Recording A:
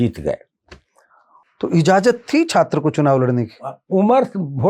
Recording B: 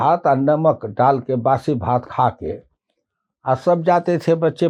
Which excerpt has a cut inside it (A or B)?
A